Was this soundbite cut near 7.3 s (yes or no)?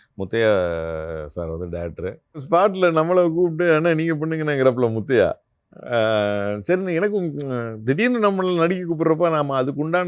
no